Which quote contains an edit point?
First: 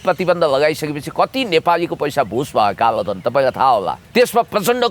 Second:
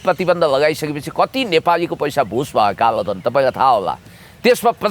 first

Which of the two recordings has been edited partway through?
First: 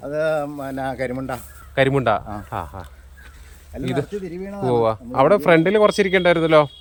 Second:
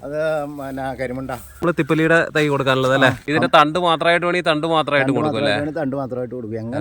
second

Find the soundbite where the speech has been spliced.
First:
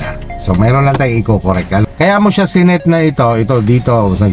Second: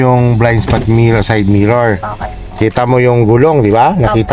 first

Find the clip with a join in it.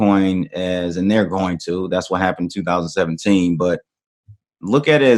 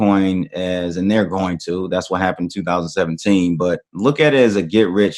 second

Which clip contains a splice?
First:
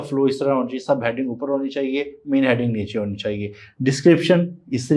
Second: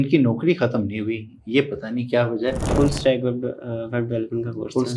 second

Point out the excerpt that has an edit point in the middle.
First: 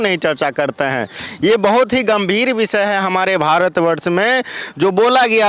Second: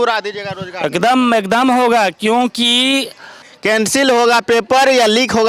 second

